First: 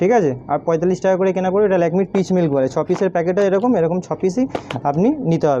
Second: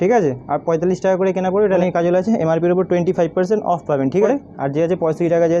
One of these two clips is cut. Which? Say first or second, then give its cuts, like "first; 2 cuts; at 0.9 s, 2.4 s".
second; 2 cuts; at 1.8 s, 4.3 s